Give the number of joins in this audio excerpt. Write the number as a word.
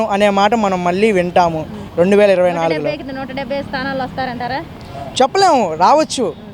zero